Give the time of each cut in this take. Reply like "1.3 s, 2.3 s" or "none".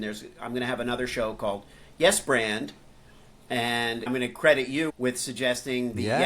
4.1 s